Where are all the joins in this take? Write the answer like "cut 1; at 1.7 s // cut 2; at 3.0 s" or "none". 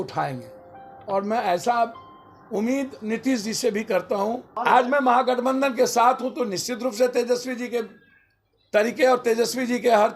cut 1; at 4.5 s